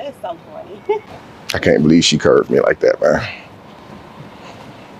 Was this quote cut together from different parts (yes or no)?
yes